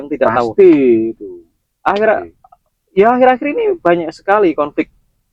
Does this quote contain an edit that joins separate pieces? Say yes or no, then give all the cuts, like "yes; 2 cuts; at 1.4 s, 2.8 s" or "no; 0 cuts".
no; 0 cuts